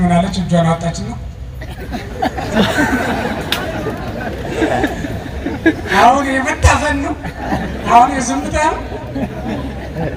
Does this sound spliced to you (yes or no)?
no